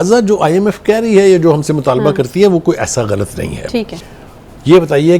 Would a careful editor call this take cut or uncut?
cut